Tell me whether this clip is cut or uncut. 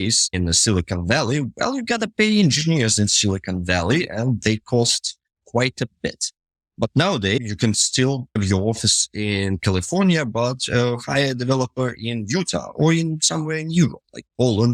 uncut